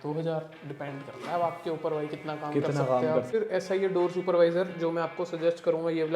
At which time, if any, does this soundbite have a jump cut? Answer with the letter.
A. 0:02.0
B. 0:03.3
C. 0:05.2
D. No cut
B